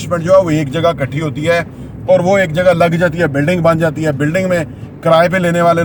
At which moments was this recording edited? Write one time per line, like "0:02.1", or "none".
none